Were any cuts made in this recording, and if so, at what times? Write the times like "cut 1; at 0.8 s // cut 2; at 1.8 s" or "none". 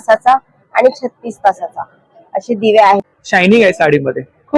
cut 1; at 3.0 s